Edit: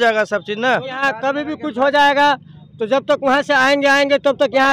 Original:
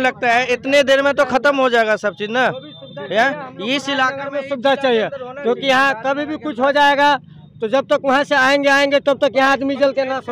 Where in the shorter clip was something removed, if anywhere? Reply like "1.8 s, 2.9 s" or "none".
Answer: 1.1 s

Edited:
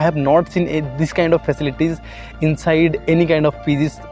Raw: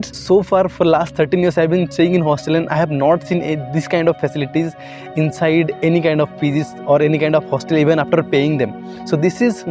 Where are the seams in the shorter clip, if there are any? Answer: none

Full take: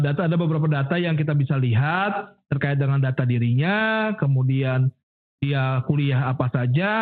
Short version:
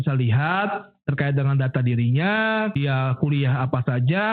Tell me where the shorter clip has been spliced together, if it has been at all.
2.7 s

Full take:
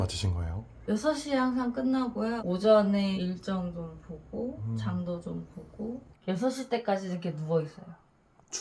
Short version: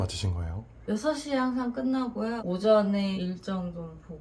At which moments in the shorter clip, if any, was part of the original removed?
none

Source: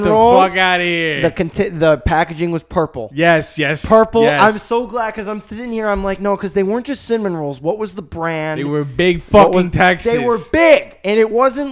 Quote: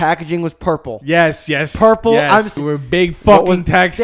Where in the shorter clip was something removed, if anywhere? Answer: 2.5 s

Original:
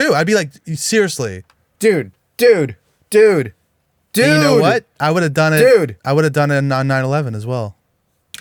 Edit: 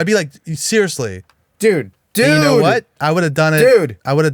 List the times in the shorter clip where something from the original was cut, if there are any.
2.0 s

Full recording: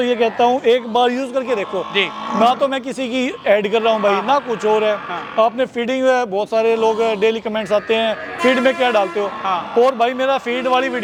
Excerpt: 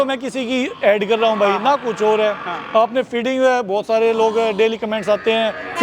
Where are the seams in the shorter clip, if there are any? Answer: none

